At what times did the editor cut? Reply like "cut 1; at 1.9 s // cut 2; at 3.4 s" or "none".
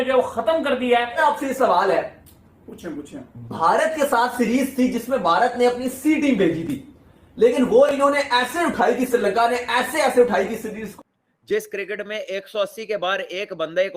cut 1; at 1.2 s // cut 2; at 10.8 s